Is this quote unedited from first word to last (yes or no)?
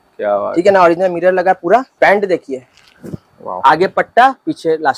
no